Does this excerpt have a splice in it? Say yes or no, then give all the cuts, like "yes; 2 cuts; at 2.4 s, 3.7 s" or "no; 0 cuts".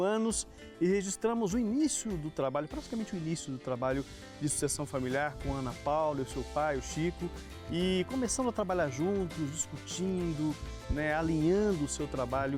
no; 0 cuts